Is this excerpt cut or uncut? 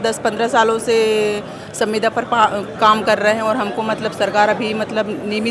uncut